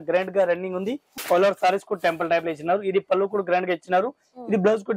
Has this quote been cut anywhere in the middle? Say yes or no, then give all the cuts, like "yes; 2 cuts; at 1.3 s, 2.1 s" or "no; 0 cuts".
yes; 1 cut; at 1.1 s